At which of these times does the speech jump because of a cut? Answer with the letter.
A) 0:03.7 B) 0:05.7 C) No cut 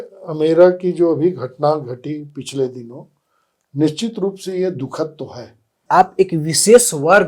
B